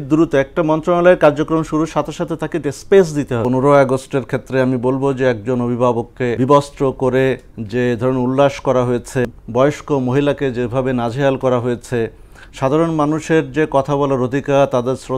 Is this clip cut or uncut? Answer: cut